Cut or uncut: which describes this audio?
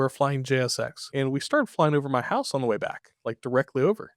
cut